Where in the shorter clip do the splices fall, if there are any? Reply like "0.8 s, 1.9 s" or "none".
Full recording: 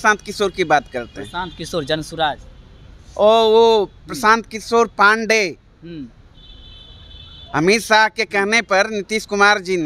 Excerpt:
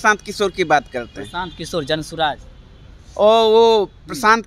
none